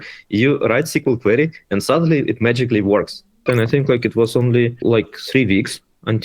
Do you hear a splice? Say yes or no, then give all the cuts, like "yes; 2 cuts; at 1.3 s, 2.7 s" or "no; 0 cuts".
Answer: yes; 2 cuts; at 3.4 s, 4.8 s